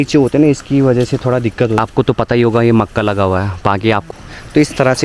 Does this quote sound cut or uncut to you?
cut